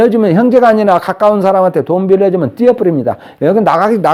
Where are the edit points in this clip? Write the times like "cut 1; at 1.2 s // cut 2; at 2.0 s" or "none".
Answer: none